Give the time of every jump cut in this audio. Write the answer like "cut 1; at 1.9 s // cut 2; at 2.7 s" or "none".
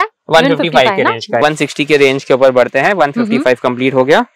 cut 1; at 1.4 s

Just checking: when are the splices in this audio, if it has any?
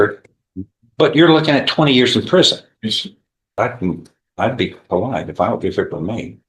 cut 1; at 3.6 s

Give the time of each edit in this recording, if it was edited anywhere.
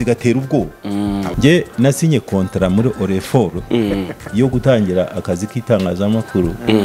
cut 1; at 1.3 s

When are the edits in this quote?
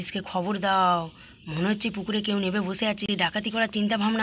cut 1; at 3.0 s

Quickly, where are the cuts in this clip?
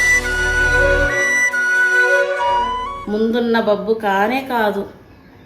cut 1; at 2.9 s

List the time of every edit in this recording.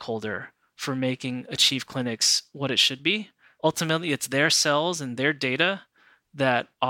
cut 1; at 3.6 s

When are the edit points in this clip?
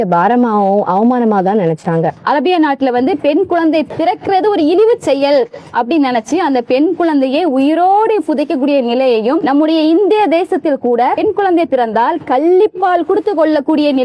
cut 1; at 2.2 s // cut 2; at 3.9 s // cut 3; at 9.4 s // cut 4; at 11.2 s

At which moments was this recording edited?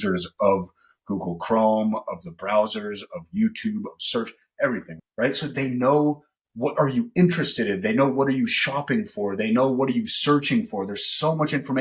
cut 1; at 4.9 s

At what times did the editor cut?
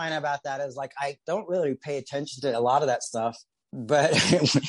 cut 1; at 3.6 s

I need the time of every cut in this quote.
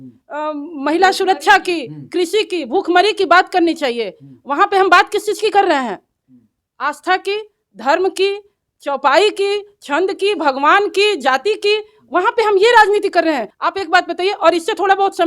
cut 1; at 13.5 s

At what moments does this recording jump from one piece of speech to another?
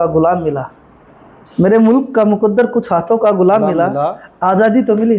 none

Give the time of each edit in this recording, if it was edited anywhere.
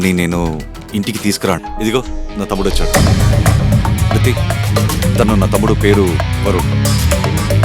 cut 1; at 1.6 s

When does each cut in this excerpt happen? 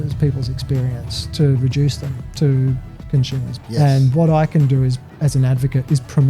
cut 1; at 3.5 s

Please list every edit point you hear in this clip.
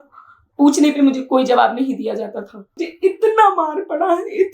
cut 1; at 2.8 s

